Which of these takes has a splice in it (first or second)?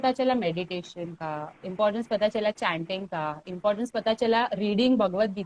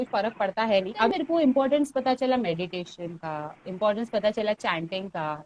second